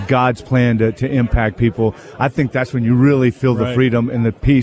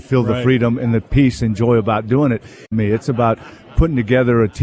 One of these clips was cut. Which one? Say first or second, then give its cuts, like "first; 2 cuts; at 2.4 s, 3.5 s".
second; 1 cut; at 2.6 s